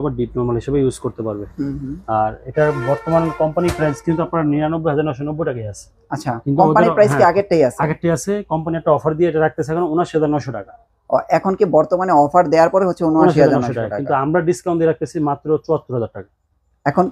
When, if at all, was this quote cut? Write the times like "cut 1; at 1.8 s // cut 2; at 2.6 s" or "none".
none